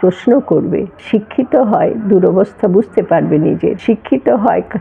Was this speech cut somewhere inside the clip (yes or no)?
yes